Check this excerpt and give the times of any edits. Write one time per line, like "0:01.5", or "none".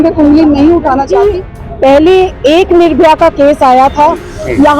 0:01.3